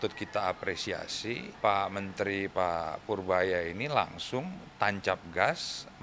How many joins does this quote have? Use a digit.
1